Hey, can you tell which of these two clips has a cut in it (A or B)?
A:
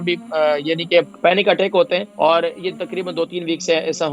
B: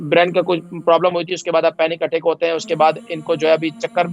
A